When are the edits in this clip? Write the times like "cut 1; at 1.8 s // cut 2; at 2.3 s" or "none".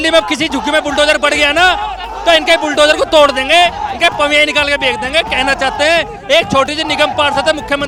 none